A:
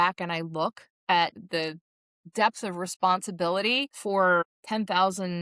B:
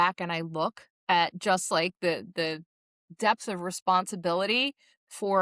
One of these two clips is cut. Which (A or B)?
A